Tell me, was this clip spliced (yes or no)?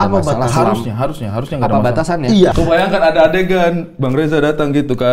yes